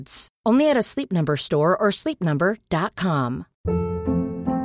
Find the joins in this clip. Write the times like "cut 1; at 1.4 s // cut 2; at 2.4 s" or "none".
cut 1; at 3.5 s